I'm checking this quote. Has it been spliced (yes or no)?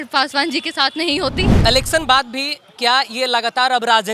yes